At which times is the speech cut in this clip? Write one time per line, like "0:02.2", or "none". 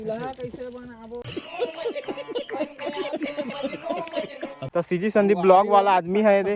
0:01.3
0:04.6